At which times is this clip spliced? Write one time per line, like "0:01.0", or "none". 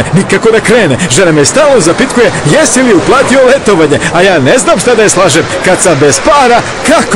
none